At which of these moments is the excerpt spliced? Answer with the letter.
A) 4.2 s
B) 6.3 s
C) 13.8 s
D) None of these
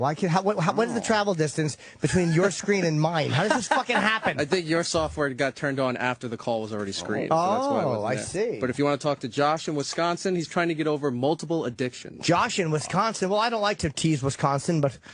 A